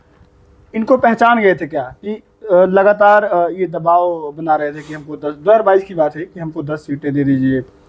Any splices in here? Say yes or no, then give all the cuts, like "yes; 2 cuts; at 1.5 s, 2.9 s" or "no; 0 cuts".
no; 0 cuts